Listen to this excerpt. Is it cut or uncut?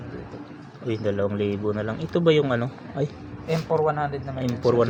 uncut